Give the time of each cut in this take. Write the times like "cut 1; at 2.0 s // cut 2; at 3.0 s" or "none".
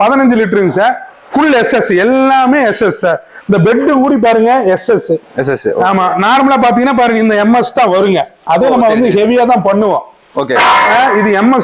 none